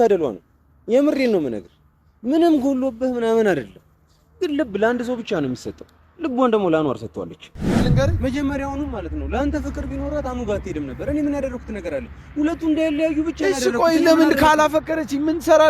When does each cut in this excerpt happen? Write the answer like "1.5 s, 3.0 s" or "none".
7.8 s